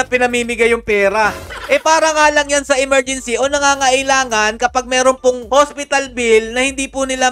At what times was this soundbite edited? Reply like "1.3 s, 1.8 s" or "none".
none